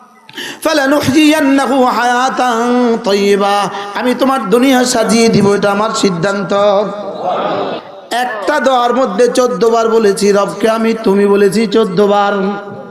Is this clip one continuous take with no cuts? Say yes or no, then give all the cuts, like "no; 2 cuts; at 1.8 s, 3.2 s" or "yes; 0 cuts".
no; 1 cut; at 7.8 s